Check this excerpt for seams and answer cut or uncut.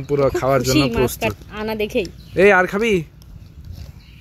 uncut